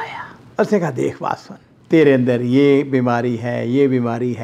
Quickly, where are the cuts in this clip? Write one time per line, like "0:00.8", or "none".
none